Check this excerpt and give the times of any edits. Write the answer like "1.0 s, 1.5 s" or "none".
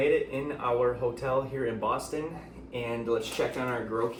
none